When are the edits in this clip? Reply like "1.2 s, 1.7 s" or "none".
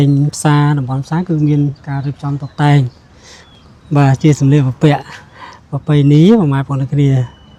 none